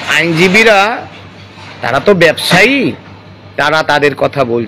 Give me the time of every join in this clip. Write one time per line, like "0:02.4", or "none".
none